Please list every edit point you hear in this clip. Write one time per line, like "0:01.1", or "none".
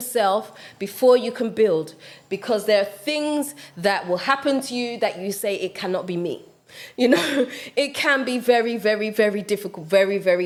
none